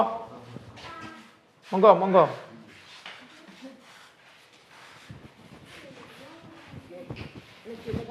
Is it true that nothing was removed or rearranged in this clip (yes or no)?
yes